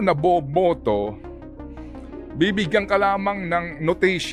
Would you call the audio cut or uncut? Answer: uncut